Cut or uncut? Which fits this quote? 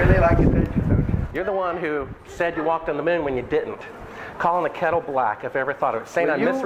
uncut